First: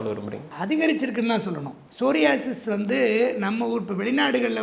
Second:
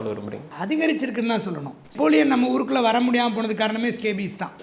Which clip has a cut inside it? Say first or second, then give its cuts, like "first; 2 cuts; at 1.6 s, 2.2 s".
second; 1 cut; at 1.9 s